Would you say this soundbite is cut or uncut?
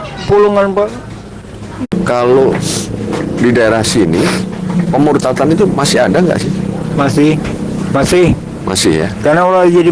cut